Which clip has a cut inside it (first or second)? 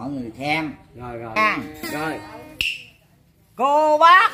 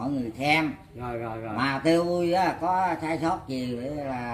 first